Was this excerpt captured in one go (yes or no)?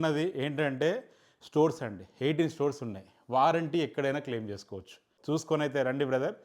no